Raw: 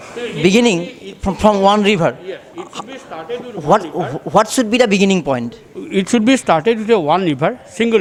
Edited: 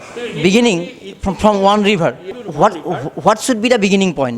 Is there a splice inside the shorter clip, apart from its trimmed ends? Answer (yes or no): yes